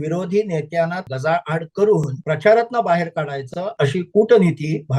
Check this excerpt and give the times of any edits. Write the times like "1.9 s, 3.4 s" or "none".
1.1 s, 2.1 s, 3.6 s